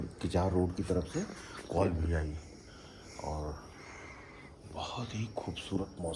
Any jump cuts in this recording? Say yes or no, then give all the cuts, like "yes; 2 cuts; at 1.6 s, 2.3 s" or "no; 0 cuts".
no; 0 cuts